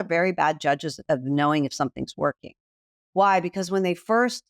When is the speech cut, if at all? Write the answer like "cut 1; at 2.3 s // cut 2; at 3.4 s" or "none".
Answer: cut 1; at 0.9 s